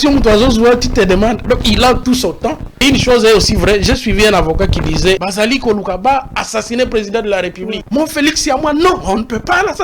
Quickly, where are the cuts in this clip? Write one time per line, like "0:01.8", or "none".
0:02.8
0:05.2
0:07.8